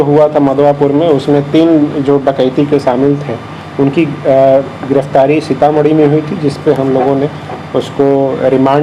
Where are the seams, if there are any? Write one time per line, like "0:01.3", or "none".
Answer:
none